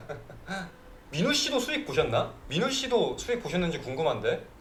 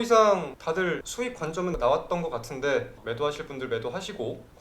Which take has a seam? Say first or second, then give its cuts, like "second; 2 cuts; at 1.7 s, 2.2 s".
second; 2 cuts; at 0.8 s, 3.0 s